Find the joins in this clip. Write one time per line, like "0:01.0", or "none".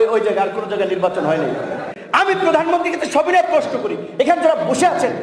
0:01.9